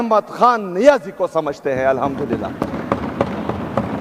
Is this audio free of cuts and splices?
yes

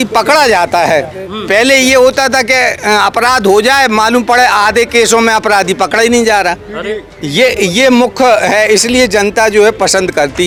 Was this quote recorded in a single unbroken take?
yes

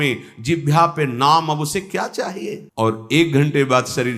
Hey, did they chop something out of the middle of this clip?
yes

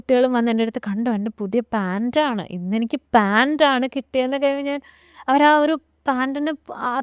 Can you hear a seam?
no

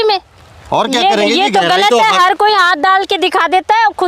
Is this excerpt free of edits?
yes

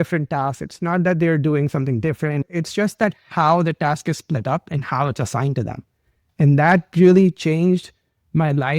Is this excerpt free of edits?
no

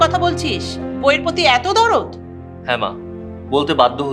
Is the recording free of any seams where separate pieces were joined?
yes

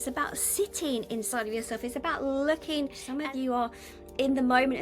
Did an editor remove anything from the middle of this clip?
yes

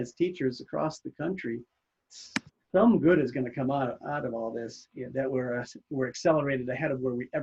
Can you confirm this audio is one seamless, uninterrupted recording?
yes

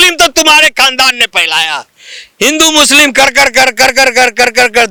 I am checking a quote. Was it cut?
no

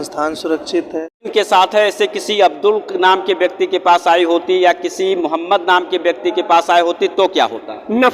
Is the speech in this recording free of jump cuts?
no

